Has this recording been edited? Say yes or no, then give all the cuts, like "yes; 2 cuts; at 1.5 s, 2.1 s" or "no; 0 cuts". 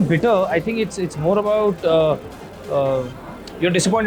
no; 0 cuts